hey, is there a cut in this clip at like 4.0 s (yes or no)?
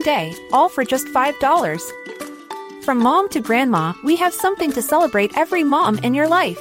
no